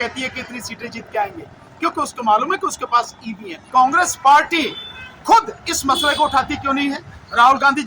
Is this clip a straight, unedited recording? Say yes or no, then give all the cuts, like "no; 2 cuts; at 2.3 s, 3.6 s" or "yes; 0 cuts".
no; 1 cut; at 3.6 s